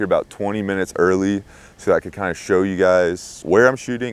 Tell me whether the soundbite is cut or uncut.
uncut